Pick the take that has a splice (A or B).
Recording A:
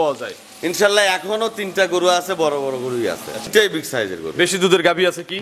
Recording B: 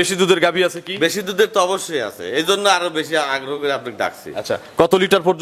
A